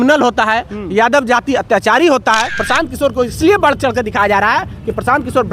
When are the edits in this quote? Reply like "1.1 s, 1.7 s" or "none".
2.6 s